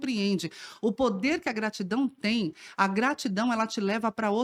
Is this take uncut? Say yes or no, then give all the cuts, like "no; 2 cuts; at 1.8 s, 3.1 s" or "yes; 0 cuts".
yes; 0 cuts